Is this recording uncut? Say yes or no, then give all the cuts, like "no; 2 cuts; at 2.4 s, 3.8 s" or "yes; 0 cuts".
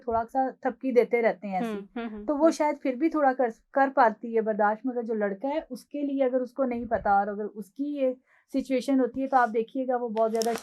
yes; 0 cuts